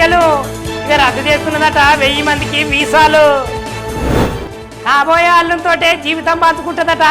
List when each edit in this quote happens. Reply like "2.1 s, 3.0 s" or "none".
3.9 s